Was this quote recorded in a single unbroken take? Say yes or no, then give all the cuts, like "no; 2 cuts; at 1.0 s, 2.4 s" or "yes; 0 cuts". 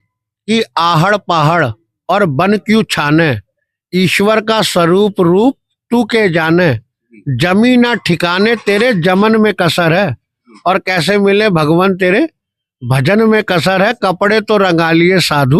yes; 0 cuts